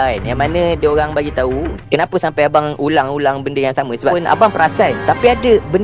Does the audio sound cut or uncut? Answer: cut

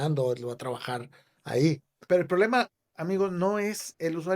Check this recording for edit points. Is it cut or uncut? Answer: cut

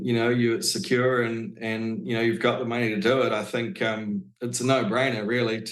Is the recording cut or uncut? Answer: uncut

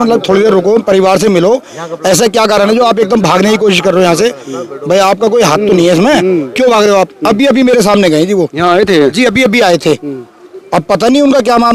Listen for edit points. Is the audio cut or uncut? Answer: uncut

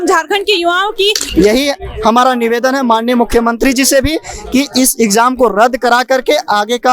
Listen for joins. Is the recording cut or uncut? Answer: cut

